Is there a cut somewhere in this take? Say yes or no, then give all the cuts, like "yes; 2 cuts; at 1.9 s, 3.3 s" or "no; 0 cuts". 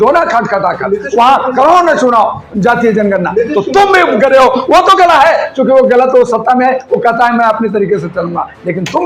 no; 0 cuts